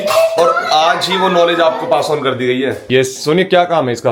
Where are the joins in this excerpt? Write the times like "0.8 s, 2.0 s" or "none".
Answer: 2.8 s